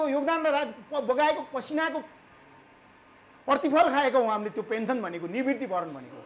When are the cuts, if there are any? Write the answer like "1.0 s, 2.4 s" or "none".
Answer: none